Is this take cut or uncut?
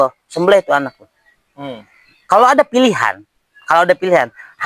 uncut